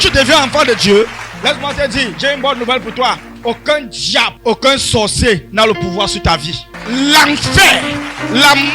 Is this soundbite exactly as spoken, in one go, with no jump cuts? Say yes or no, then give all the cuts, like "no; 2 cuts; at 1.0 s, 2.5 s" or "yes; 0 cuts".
no; 4 cuts; at 1.2 s, 3.3 s, 4.3 s, 6.7 s